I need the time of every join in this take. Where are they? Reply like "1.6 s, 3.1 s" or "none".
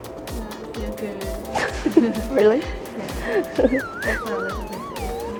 none

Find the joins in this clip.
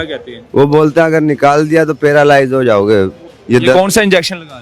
3.2 s

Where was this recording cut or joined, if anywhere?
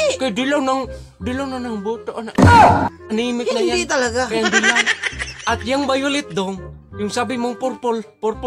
none

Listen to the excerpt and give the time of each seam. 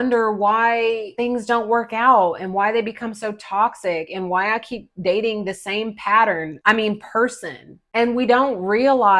7.7 s

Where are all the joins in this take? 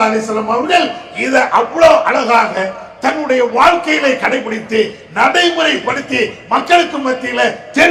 none

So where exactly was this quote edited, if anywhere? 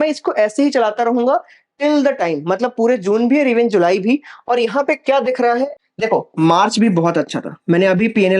5.8 s

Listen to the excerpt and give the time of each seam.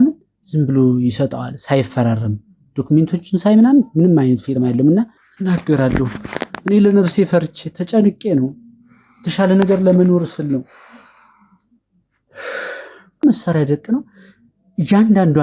5.2 s, 13.1 s

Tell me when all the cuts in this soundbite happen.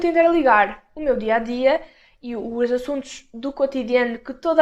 none

